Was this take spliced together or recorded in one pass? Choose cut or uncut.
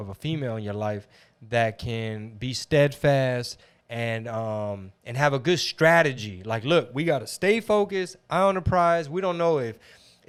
uncut